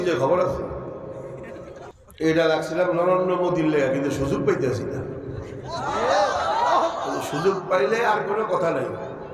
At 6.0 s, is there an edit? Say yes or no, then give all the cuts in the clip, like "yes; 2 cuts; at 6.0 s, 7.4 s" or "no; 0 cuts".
no; 1 cut; at 1.9 s